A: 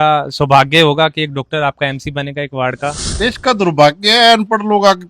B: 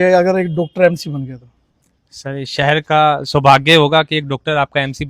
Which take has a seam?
A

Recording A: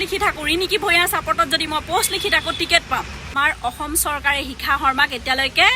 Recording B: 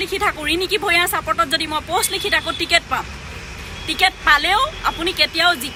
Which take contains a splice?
A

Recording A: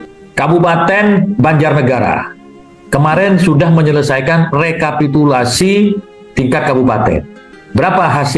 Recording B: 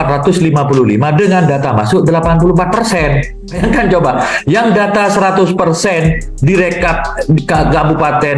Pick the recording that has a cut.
B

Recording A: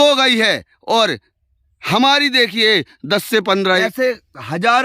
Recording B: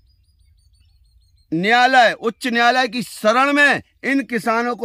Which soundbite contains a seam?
A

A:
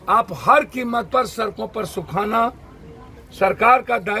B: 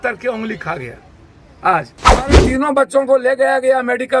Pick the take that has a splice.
B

